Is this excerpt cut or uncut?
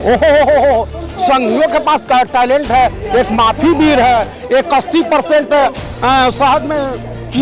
uncut